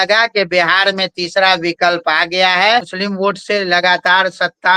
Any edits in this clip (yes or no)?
yes